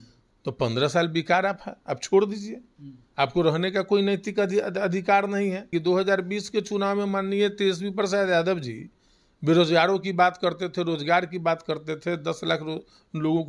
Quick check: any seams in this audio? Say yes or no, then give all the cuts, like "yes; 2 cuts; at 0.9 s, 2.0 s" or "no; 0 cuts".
yes; 1 cut; at 5.7 s